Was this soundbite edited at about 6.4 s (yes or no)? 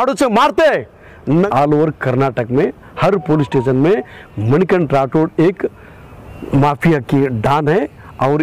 no